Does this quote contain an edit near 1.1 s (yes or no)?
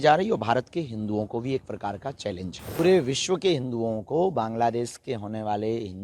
no